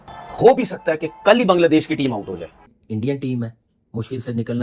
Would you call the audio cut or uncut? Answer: cut